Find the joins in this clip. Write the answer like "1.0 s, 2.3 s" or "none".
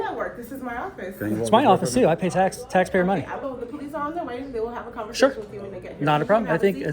3.4 s